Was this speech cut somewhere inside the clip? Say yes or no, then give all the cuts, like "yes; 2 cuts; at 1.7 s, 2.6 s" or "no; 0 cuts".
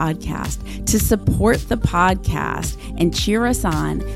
no; 0 cuts